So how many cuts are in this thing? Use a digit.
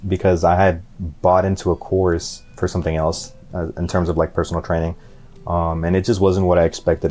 2